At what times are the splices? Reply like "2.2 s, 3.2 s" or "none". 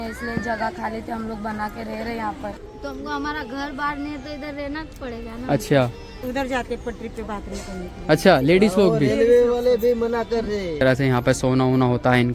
2.6 s, 6.2 s, 10.8 s